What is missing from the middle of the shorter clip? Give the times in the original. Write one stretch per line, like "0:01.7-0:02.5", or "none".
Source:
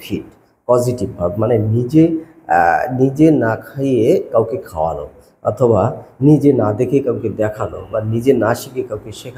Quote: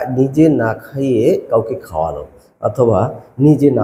none